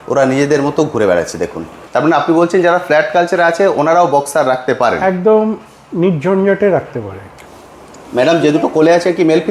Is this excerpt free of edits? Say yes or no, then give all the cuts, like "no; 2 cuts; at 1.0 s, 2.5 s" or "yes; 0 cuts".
no; 2 cuts; at 1.7 s, 7.4 s